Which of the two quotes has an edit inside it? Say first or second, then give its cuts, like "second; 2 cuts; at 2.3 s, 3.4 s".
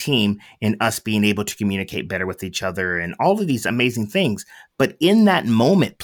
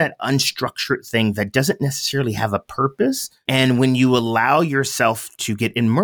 second; 1 cut; at 3.3 s